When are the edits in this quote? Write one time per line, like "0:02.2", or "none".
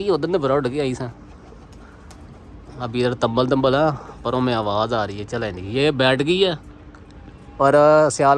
none